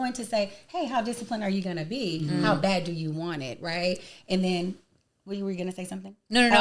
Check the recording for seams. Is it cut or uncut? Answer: uncut